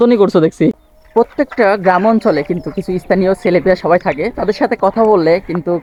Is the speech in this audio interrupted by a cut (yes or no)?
no